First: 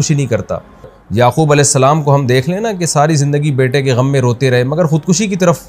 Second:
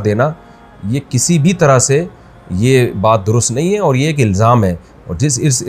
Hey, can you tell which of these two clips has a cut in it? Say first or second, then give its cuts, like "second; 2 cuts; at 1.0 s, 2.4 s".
first; 1 cut; at 1.0 s